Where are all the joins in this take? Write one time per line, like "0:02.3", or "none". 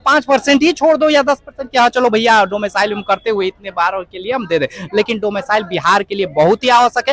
none